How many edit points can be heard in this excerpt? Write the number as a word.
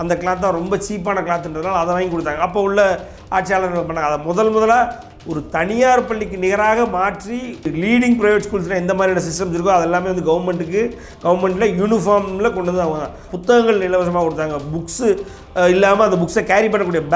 two